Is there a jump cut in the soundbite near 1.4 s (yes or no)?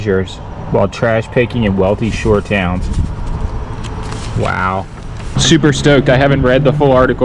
no